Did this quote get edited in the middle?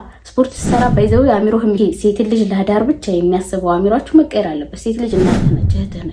yes; 1 cut; at 1.8 s

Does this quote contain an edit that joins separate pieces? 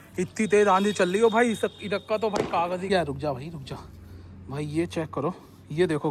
yes; 1 cut; at 2.9 s

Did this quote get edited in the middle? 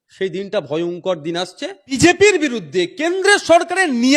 yes; 1 cut; at 2.0 s

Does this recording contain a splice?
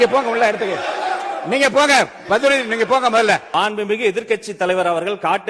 yes; 1 cut; at 3.5 s

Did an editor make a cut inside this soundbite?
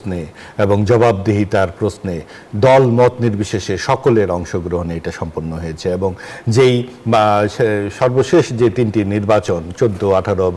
no; 0 cuts

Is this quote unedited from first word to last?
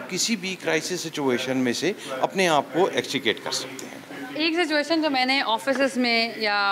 yes; 0 cuts

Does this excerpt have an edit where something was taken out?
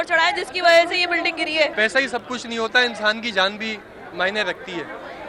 yes; 1 cut; at 1.7 s

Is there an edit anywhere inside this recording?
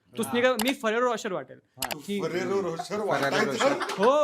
yes; 1 cut; at 2.0 s

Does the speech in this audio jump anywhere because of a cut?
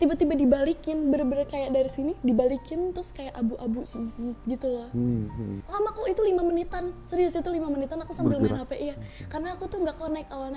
yes; 1 cut; at 5.6 s

